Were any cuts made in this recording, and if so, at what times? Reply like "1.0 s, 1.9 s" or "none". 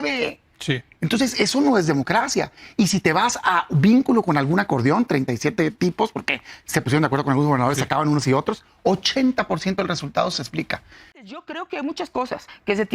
11.4 s